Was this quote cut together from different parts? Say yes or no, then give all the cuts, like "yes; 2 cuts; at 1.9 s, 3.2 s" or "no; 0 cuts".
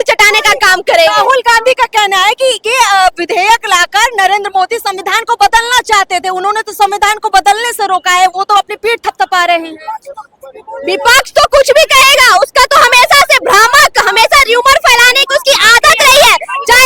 no; 0 cuts